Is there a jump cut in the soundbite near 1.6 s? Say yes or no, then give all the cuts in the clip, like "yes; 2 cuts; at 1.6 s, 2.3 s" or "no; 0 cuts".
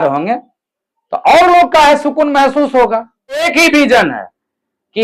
no; 1 cut; at 3.5 s